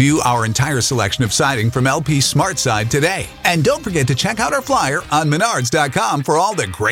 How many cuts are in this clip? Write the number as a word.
zero